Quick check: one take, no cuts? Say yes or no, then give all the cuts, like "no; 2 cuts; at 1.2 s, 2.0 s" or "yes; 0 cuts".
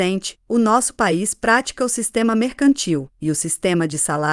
yes; 0 cuts